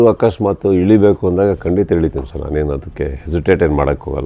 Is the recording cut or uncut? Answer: uncut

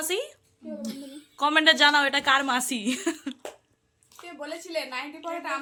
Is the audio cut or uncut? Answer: uncut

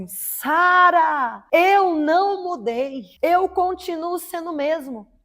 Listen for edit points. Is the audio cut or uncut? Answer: cut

